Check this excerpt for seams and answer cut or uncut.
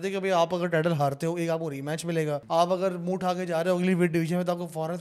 cut